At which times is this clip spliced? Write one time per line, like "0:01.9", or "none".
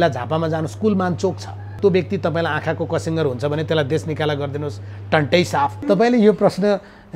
0:01.8
0:05.8